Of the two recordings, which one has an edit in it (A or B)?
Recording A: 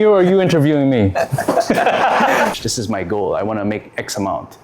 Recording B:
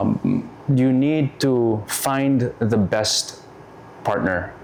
A